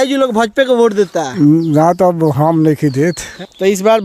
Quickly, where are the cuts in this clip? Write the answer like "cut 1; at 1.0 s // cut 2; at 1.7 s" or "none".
none